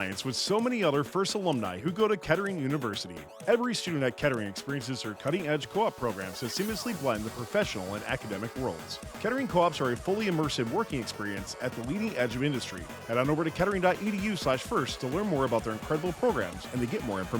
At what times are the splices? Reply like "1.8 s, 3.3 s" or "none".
none